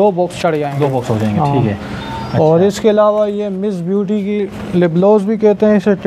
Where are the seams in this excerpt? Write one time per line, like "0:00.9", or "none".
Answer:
none